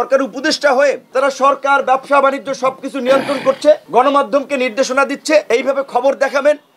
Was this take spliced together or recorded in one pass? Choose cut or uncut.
cut